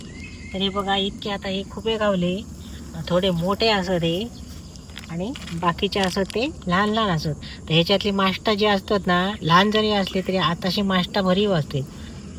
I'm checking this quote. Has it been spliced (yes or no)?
no